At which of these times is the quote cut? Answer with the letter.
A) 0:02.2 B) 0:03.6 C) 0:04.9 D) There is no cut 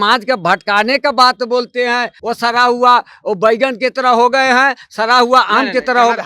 A